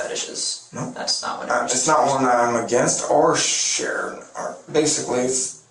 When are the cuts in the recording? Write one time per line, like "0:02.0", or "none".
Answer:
none